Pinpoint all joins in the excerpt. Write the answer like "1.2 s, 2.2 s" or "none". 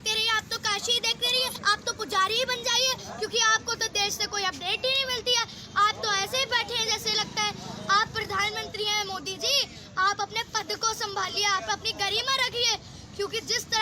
1.6 s